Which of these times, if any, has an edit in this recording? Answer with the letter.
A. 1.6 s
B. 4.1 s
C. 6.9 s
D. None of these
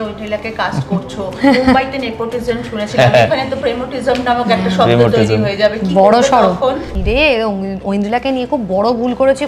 C